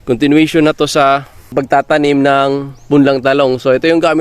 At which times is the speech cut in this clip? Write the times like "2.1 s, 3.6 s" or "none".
1.5 s